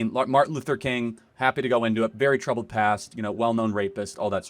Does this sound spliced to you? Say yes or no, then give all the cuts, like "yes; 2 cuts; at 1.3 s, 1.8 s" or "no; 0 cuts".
no; 0 cuts